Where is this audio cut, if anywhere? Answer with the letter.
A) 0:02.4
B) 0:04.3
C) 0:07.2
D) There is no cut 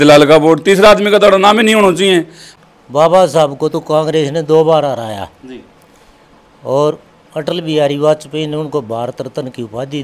A